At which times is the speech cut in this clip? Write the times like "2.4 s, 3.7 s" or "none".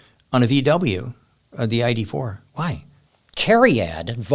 2.9 s